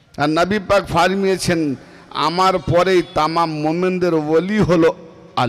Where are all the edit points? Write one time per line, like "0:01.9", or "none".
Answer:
none